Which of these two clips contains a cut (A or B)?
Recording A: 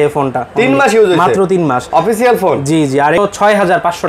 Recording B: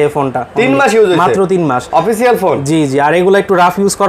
A